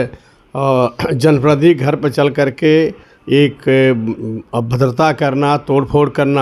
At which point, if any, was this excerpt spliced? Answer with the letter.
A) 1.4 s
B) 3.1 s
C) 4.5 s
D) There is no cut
D